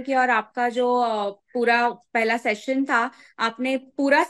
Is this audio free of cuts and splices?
yes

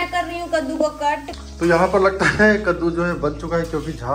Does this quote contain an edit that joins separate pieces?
yes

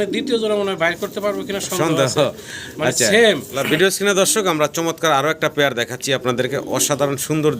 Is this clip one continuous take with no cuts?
no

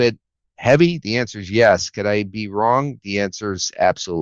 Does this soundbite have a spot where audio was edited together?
no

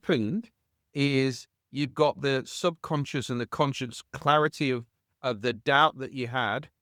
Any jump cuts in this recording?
no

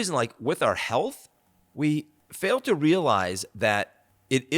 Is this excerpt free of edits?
no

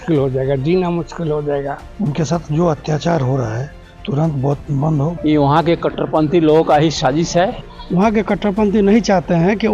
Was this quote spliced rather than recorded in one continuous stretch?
yes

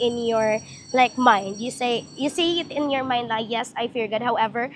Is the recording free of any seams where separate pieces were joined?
yes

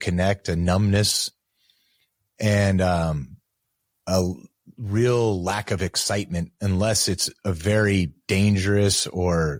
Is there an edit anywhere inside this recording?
no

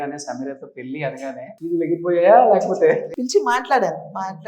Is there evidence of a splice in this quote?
yes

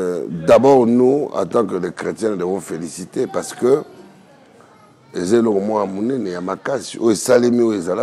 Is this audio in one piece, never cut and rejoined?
yes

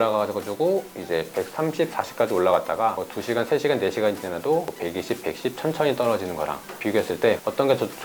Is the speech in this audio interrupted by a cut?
no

